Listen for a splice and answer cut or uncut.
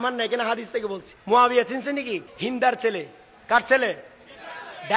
cut